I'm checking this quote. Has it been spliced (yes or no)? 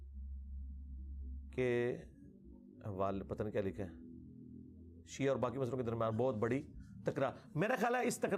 no